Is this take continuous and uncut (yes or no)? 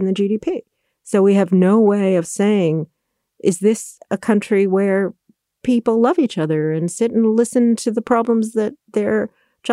yes